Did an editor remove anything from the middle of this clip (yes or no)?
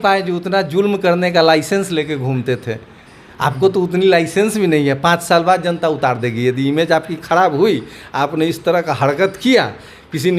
no